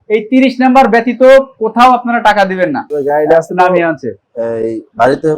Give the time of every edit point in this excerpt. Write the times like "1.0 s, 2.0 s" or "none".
2.9 s

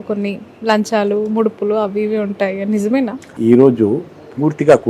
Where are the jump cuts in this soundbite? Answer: 3.3 s

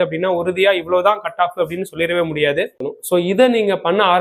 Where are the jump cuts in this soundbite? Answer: 2.9 s

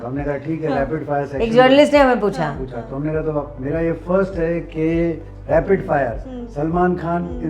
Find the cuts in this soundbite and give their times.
none

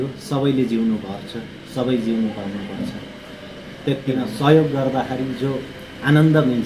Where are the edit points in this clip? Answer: 4.2 s

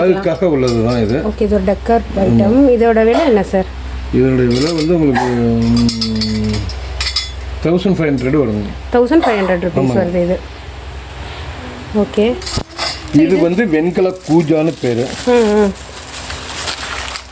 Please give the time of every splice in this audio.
none

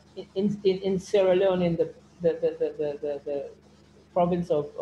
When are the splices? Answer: none

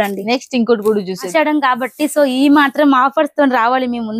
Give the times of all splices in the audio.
1.2 s

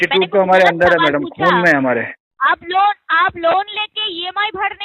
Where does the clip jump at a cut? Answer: 2.3 s

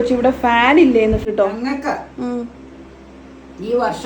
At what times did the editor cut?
1.3 s

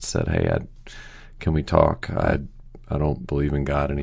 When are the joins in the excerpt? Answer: 2.4 s

